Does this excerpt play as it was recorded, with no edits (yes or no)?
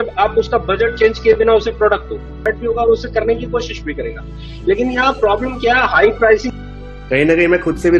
no